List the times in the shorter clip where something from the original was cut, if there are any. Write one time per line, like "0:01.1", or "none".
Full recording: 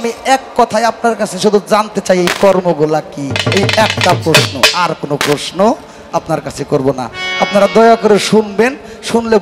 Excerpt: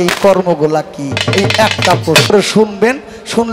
0:02.3